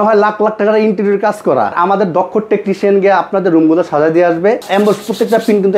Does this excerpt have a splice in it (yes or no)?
yes